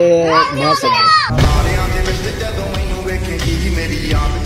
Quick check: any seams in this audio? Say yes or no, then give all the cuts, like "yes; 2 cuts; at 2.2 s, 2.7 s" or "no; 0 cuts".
no; 0 cuts